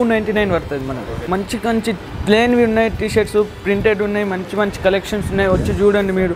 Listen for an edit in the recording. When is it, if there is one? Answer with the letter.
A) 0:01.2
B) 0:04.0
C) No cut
A